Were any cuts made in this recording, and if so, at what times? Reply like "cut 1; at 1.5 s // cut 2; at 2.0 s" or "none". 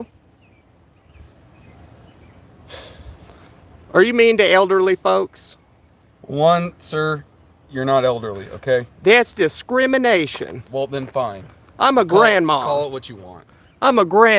none